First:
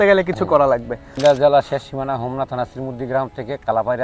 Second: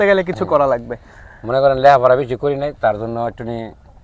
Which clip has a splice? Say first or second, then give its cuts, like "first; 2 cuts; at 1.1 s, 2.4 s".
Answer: first; 1 cut; at 1.1 s